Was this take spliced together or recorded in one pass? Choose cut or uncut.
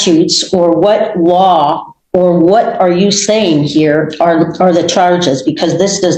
uncut